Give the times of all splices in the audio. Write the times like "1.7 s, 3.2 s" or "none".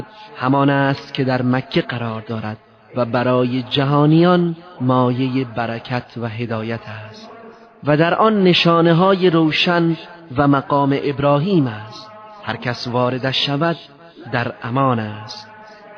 none

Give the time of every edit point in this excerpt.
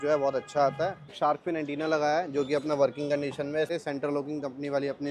1.1 s, 3.7 s

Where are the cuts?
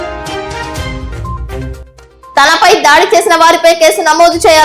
1.8 s

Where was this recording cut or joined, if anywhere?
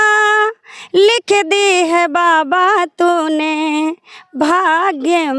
none

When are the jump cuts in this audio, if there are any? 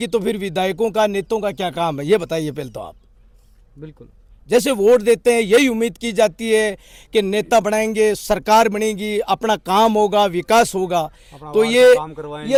none

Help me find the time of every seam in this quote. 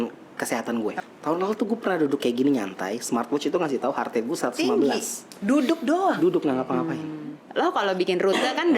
1.0 s, 7.4 s

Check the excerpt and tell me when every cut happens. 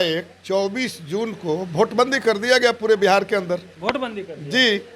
none

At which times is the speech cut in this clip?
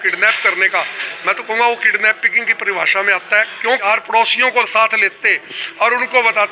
3.8 s

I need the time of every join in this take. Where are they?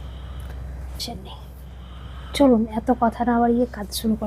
1.0 s

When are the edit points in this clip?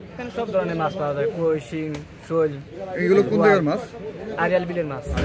none

